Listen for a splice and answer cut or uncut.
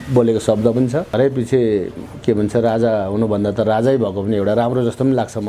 cut